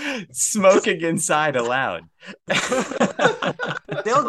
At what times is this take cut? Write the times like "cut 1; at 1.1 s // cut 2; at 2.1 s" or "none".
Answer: none